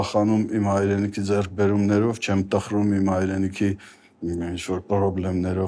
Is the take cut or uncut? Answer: uncut